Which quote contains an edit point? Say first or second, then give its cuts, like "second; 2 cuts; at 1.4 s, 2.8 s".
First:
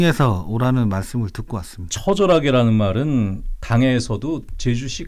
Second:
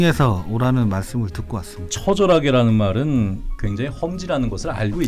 second; 1 cut; at 3.6 s